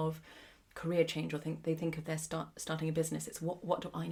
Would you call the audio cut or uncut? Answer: uncut